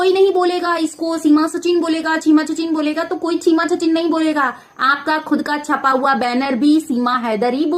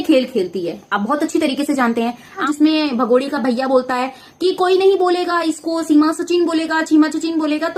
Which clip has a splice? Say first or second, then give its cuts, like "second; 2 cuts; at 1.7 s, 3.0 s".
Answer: second; 1 cut; at 2.4 s